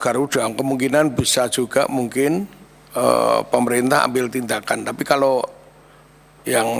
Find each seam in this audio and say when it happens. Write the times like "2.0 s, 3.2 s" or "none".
none